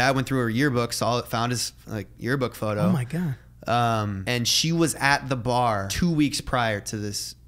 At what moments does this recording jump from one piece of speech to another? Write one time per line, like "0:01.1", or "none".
0:04.2
0:05.9